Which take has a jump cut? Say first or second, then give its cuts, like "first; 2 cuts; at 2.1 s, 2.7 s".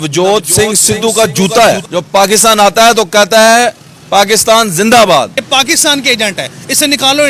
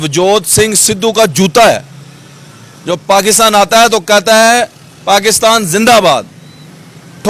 first; 2 cuts; at 1.8 s, 5.4 s